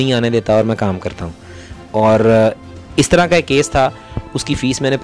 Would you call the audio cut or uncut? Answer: uncut